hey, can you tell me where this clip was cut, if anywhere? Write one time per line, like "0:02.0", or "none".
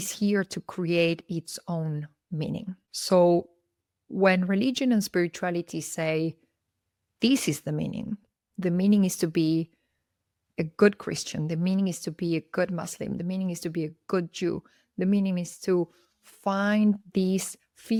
none